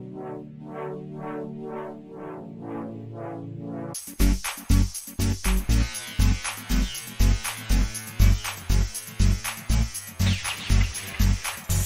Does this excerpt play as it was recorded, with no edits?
yes; 0 cuts

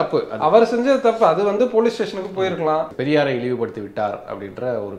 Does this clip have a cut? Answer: yes; 1 cut; at 2.9 s

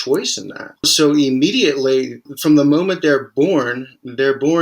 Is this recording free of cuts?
no; 2 cuts; at 0.9 s, 2.2 s

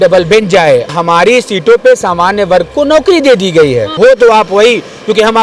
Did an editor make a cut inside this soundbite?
yes; 2 cuts; at 0.9 s, 3.9 s

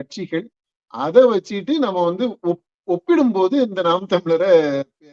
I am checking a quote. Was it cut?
no; 0 cuts

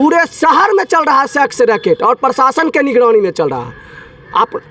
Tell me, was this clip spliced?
no; 0 cuts

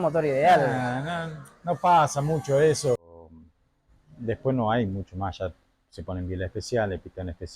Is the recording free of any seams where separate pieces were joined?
no; 1 cut; at 3.3 s

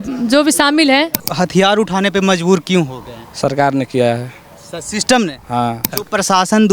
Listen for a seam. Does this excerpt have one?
yes; 2 cuts; at 1.2 s, 5.9 s

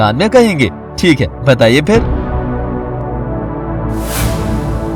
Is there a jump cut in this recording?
yes; 1 cut; at 2.0 s

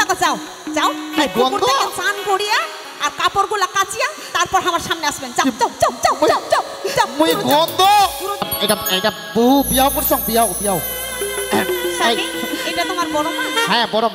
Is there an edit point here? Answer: yes; 1 cut; at 8.5 s

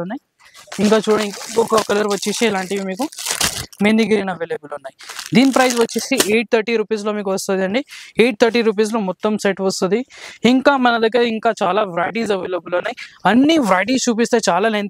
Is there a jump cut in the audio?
no; 0 cuts

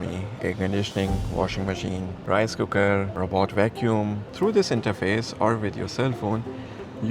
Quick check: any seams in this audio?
yes; 3 cuts; at 2.1 s, 3.1 s, 4.2 s

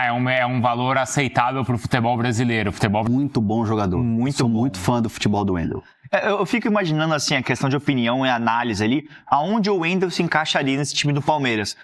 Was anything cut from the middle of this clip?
yes; 1 cut; at 3.1 s

